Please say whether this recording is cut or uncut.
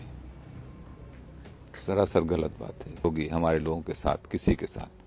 cut